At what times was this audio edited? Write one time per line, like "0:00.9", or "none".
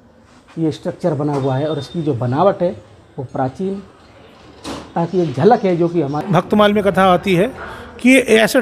0:06.2